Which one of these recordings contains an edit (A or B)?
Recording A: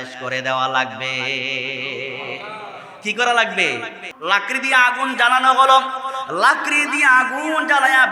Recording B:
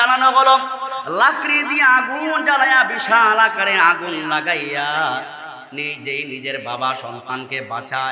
A